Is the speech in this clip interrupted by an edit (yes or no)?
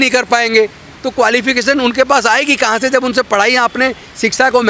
no